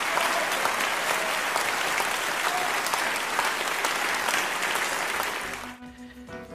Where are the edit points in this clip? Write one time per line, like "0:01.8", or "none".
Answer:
0:04.2